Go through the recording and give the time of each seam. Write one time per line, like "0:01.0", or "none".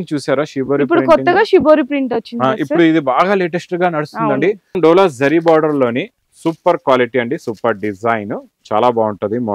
0:04.8